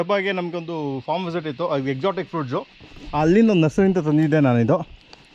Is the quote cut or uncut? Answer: uncut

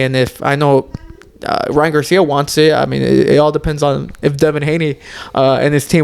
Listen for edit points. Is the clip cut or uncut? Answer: uncut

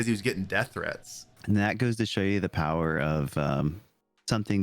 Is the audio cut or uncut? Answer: cut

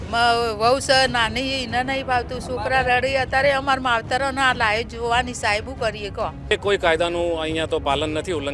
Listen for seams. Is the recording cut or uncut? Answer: cut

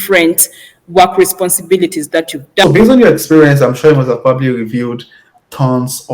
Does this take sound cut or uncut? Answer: cut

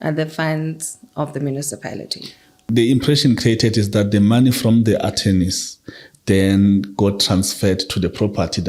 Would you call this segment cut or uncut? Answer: cut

